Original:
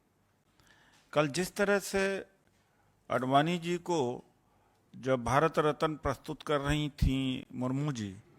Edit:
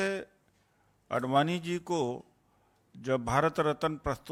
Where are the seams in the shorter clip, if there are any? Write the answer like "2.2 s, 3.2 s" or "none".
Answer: none